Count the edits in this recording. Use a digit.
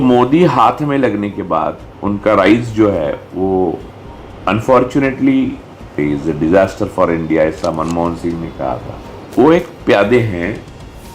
2